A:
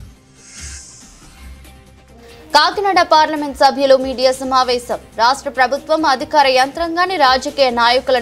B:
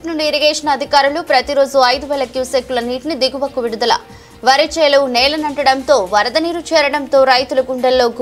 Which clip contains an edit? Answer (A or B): A